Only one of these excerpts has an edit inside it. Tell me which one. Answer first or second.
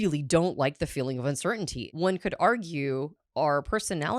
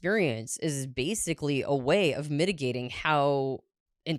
first